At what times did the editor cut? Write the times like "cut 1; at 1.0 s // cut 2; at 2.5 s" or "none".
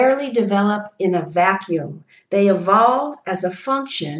none